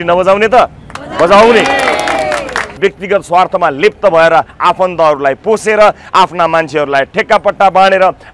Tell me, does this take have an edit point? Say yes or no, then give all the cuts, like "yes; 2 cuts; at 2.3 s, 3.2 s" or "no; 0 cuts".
yes; 1 cut; at 2.8 s